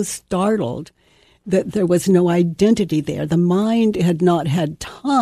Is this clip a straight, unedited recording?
yes; 0 cuts

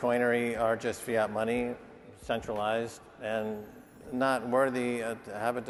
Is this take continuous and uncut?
yes; 0 cuts

